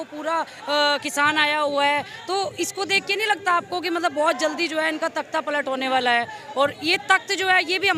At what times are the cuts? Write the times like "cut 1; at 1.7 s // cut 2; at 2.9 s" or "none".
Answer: none